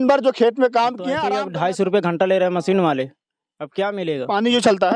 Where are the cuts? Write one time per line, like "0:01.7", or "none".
0:01.1